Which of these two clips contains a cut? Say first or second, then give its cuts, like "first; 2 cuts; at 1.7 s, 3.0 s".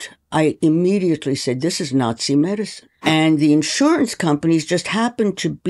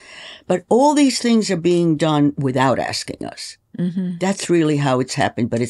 first; 1 cut; at 2.8 s